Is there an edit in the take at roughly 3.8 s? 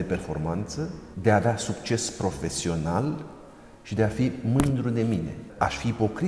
no; 2 cuts; at 1.0 s, 5.4 s

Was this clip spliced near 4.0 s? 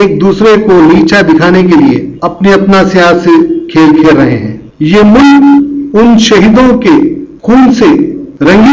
yes; 1 cut; at 4.0 s

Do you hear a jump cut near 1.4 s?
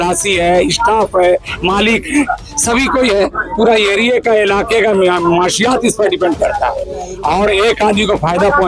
no; 0 cuts

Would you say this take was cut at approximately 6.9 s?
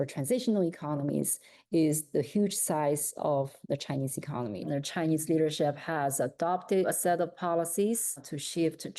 yes; 2 cuts; at 4.7 s, 6.9 s

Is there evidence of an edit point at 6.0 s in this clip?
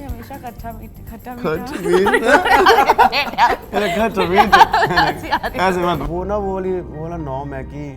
yes; 1 cut; at 6.0 s

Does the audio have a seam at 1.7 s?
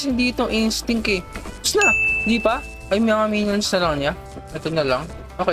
yes; 1 cut; at 1.7 s

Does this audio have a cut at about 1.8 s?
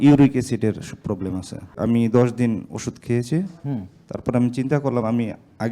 yes; 1 cut; at 1.8 s

